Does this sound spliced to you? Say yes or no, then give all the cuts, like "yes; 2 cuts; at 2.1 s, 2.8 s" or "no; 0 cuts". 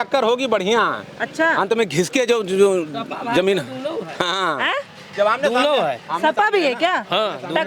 no; 0 cuts